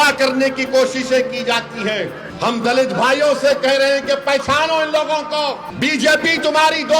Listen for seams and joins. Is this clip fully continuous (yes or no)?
no